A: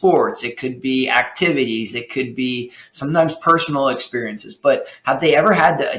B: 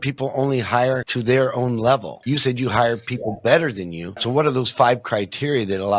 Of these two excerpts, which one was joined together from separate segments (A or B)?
B